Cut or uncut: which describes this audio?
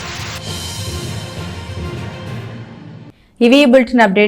uncut